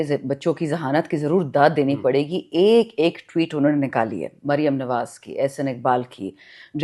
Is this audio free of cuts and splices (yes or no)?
yes